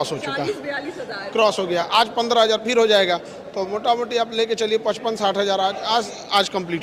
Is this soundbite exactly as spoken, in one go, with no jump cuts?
yes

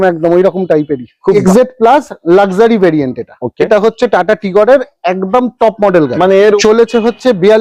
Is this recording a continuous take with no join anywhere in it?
no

